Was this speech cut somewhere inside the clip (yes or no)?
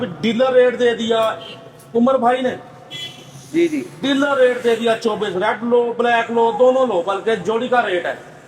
no